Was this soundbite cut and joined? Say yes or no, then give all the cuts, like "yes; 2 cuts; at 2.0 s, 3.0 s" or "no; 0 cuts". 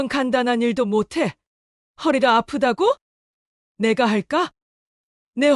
no; 0 cuts